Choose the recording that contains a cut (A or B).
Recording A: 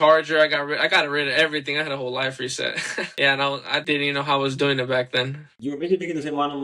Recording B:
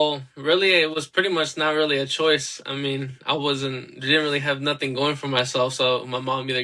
A